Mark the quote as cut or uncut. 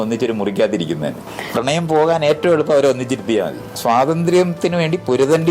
cut